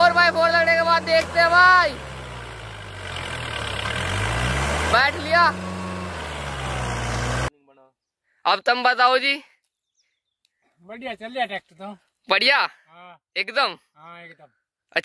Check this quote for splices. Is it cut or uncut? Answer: cut